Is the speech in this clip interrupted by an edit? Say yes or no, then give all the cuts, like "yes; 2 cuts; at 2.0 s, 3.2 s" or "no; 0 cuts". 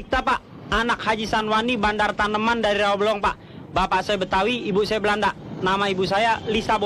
no; 0 cuts